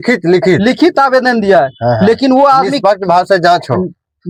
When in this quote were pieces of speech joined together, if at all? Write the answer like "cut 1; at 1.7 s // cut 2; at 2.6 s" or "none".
none